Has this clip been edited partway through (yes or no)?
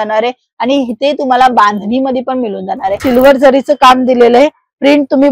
yes